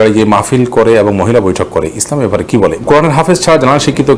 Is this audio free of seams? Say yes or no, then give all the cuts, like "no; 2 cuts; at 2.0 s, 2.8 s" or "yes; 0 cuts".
no; 1 cut; at 2.8 s